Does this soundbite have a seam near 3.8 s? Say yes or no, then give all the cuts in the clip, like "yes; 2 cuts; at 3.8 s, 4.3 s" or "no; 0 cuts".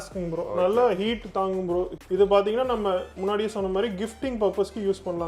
no; 1 cut; at 2.0 s